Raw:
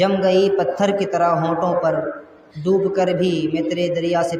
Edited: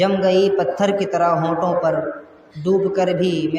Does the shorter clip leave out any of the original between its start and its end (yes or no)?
no